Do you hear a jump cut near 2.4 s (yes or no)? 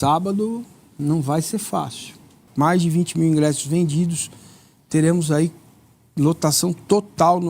yes